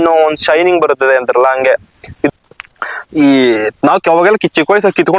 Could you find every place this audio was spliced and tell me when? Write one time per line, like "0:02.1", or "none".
0:02.3